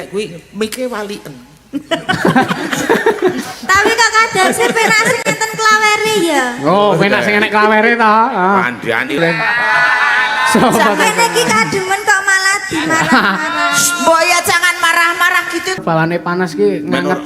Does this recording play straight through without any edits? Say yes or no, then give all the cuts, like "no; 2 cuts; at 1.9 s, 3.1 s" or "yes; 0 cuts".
no; 2 cuts; at 9.2 s, 15.8 s